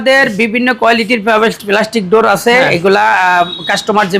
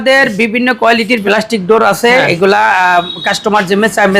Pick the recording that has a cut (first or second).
second